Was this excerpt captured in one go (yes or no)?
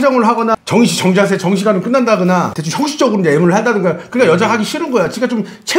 yes